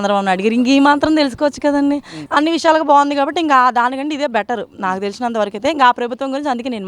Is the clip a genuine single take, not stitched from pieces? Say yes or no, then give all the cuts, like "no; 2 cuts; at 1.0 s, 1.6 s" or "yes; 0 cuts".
no; 1 cut; at 2.1 s